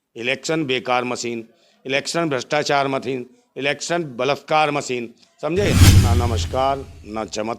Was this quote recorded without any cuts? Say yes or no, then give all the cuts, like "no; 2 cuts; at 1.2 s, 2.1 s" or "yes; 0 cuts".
no; 1 cut; at 5.9 s